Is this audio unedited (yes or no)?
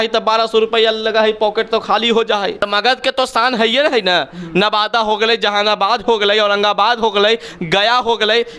no